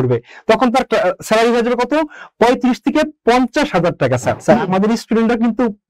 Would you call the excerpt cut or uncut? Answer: cut